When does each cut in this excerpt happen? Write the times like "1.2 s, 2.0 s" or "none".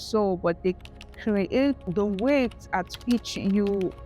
1.8 s